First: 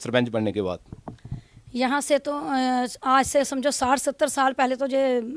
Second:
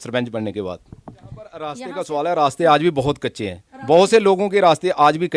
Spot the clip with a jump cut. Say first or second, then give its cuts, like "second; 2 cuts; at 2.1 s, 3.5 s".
second; 1 cut; at 1.6 s